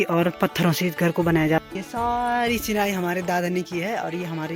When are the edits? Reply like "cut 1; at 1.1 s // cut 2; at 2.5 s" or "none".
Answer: cut 1; at 1.6 s

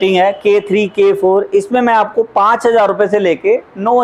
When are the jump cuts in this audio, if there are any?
none

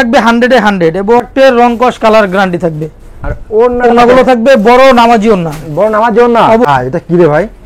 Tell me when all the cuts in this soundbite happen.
cut 1; at 1.3 s // cut 2; at 6.7 s

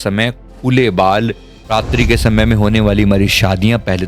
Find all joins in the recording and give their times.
cut 1; at 1.5 s

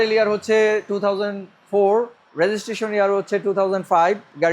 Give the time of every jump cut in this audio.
cut 1; at 2.2 s

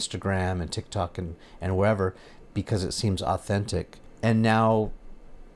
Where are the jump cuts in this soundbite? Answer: cut 1; at 4.0 s

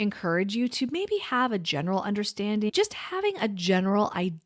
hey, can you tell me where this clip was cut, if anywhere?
cut 1; at 2.7 s

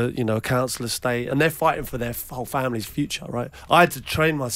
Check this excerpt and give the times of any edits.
cut 1; at 1.3 s // cut 2; at 3.6 s

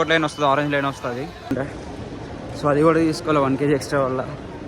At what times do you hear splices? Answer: cut 1; at 1.5 s

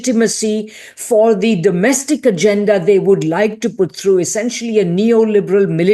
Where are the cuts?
none

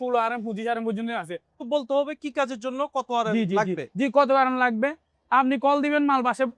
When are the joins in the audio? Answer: cut 1; at 1.6 s

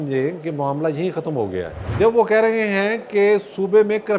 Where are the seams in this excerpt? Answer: cut 1; at 1.8 s

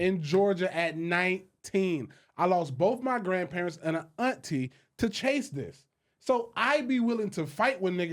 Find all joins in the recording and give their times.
none

